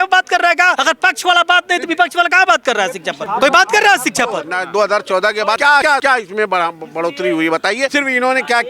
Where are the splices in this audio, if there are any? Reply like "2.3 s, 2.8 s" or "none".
0.8 s, 3.2 s, 4.5 s, 5.8 s, 7.9 s